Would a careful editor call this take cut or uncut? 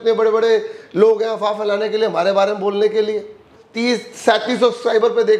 cut